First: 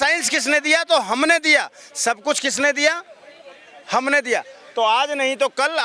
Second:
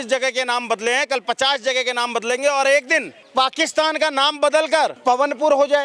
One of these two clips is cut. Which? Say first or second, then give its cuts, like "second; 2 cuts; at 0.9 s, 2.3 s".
second; 2 cuts; at 3.2 s, 5.0 s